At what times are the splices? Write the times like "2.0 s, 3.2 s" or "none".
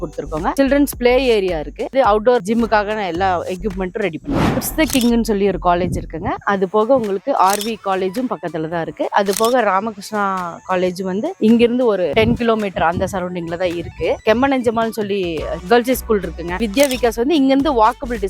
2.4 s, 4.5 s, 16.6 s